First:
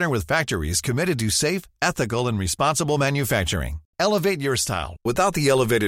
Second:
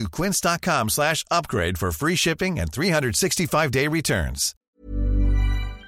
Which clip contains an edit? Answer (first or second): second